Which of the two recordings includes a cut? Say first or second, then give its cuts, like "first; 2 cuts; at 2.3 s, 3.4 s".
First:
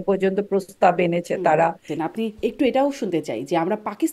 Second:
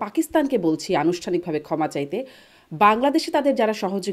first; 1 cut; at 1.9 s